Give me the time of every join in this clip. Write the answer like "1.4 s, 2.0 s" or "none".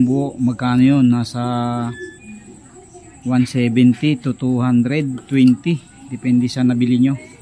none